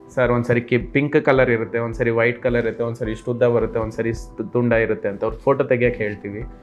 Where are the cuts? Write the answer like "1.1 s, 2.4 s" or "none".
none